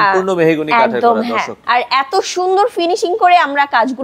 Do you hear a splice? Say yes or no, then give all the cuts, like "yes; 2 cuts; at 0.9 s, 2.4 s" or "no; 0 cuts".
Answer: yes; 1 cut; at 1.5 s